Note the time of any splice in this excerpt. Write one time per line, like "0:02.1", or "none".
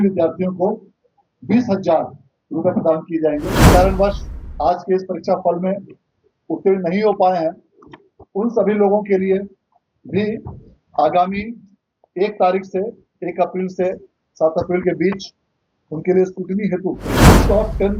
0:03.6
0:17.3